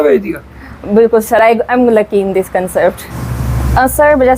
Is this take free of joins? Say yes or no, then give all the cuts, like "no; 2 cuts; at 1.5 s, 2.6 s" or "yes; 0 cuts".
no; 1 cut; at 3.1 s